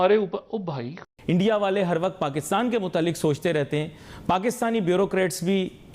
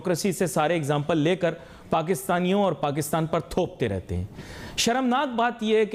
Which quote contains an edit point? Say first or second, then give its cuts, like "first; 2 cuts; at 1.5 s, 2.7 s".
first; 1 cut; at 1.1 s